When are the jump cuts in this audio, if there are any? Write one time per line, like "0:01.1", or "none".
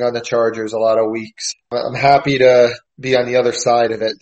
0:01.6
0:02.9